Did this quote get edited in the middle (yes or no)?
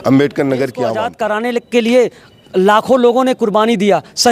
yes